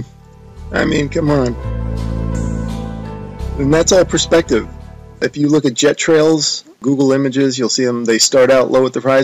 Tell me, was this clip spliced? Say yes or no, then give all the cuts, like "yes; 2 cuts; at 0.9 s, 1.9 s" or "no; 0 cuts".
yes; 1 cut; at 5.1 s